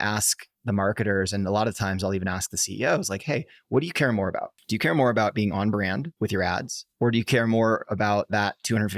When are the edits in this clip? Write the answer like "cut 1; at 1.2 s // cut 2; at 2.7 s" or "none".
cut 1; at 4.6 s // cut 2; at 6.1 s // cut 3; at 6.8 s